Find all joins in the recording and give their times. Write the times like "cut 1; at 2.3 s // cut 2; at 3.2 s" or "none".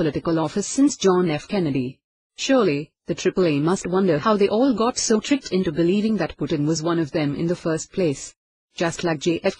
cut 1; at 8.6 s